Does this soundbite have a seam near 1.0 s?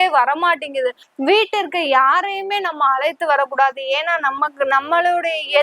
yes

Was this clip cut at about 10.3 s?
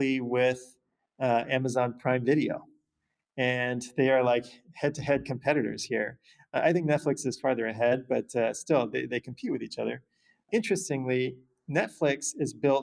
yes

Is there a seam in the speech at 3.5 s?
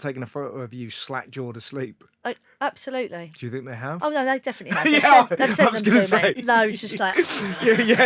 no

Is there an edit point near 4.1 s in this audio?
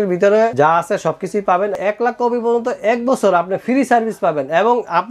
no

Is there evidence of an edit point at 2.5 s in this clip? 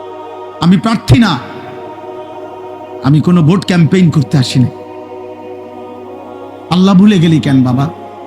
no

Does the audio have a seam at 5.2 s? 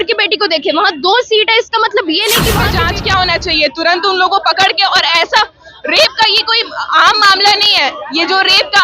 no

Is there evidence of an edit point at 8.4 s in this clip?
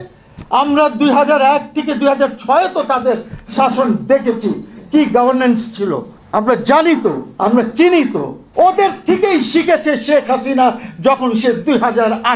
yes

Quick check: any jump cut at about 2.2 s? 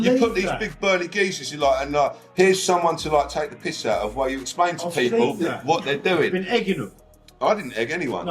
yes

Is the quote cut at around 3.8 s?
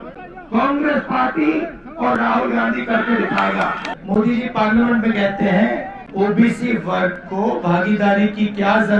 yes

